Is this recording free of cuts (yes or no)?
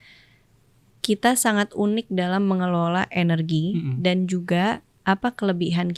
yes